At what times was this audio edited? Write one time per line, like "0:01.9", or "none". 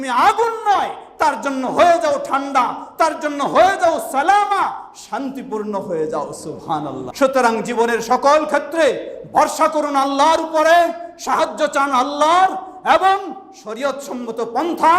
0:07.0